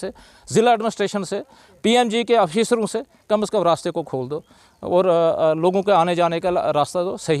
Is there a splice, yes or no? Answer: no